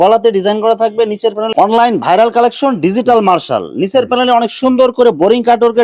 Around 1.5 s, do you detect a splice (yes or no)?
yes